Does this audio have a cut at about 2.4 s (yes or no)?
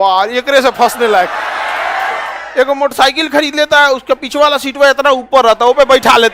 yes